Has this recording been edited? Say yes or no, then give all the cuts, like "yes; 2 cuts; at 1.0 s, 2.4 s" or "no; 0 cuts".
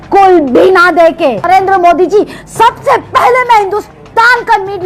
yes; 1 cut; at 1.4 s